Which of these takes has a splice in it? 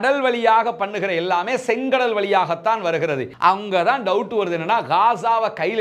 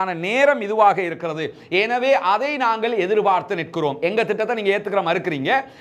first; 1 cut; at 3.3 s

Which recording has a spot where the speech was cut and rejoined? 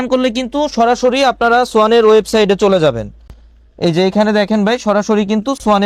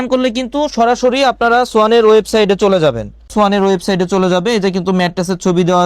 second; 1 cut; at 3.2 s

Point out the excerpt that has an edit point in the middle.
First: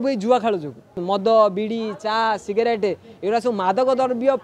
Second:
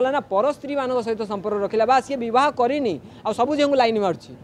first; 1 cut; at 0.9 s

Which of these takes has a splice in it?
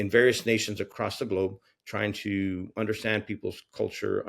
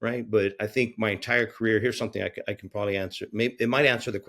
first; 2 cuts; at 0.9 s, 2.7 s

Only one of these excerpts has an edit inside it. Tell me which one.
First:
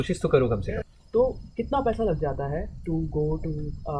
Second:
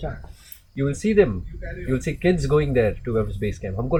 first; 1 cut; at 0.9 s

